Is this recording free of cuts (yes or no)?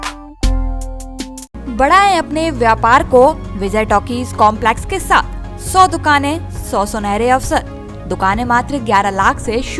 yes